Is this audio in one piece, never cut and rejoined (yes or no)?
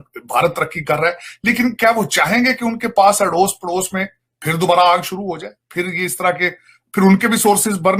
yes